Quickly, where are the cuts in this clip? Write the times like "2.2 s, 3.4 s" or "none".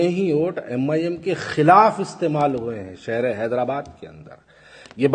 none